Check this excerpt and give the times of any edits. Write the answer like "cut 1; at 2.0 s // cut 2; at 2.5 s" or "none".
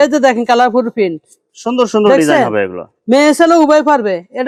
none